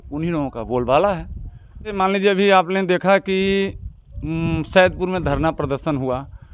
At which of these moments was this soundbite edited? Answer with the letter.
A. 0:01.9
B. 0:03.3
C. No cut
A